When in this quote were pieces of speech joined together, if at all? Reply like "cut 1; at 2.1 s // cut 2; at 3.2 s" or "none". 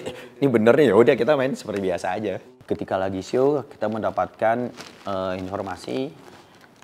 cut 1; at 2.5 s